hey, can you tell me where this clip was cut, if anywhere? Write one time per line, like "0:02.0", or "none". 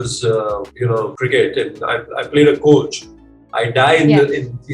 0:01.0